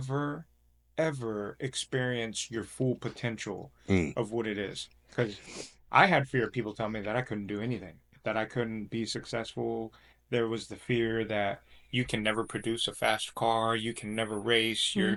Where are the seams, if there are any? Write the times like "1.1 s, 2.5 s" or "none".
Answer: none